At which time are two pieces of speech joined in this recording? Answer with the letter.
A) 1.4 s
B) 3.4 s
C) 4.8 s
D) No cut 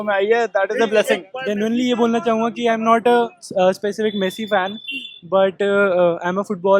A